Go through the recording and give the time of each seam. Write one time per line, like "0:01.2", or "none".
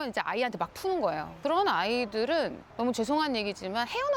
none

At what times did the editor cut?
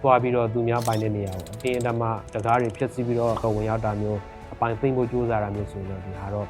0:03.4

